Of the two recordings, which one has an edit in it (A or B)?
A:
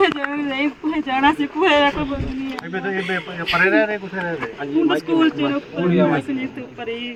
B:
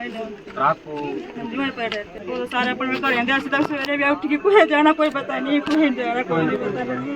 B